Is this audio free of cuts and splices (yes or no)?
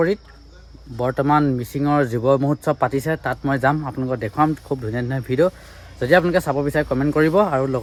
yes